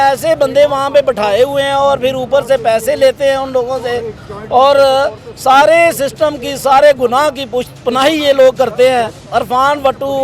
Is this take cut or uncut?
cut